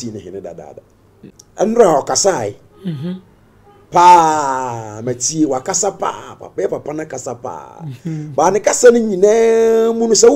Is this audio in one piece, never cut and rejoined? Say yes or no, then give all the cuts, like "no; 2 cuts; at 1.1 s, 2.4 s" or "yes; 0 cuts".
no; 1 cut; at 1.4 s